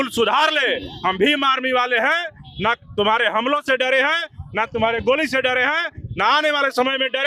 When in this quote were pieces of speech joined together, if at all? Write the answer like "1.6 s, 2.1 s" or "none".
none